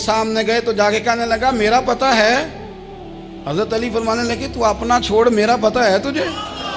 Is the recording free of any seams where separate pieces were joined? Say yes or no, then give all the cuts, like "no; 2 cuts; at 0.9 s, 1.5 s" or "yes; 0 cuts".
yes; 0 cuts